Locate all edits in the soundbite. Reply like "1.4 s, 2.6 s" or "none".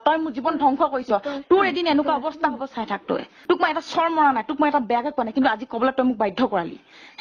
3.3 s